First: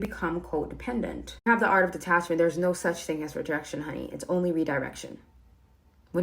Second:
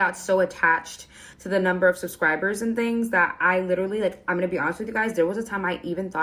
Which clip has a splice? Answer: first; 1 cut; at 1.5 s

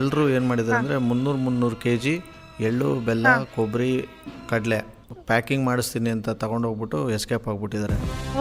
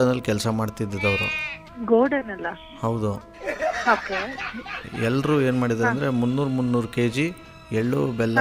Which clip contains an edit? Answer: first; 1 cut; at 5.1 s

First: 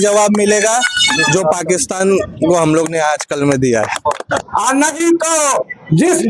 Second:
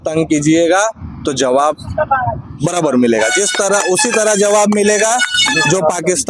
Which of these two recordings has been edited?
first; 1 cut; at 4.5 s

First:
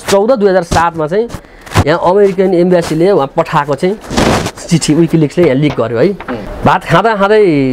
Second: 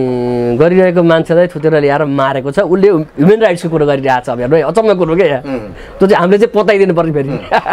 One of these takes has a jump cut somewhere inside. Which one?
first; 1 cut; at 6.5 s

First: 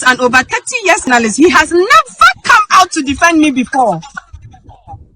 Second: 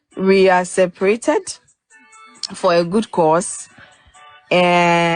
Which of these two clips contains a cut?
first; 1 cut; at 1.1 s

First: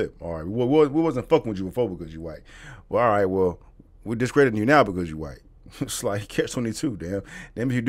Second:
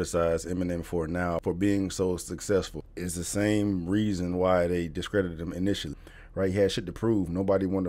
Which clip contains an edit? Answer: second; 3 cuts; at 1.4 s, 2.8 s, 6.0 s

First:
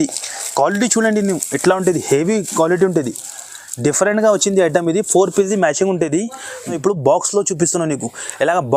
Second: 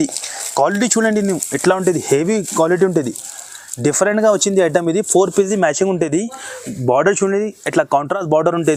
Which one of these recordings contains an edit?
first; 1 cut; at 6.7 s

